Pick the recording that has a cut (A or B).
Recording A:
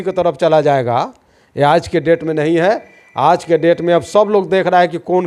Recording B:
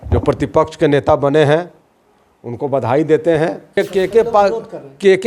B